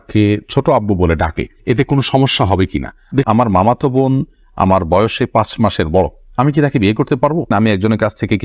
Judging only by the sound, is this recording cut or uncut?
cut